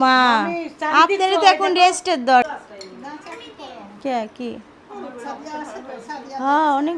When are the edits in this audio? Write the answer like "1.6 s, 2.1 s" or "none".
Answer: 2.6 s